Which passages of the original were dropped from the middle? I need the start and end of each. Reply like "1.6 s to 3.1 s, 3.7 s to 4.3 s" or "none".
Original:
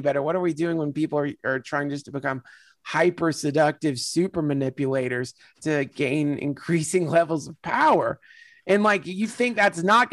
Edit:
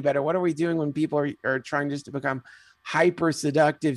none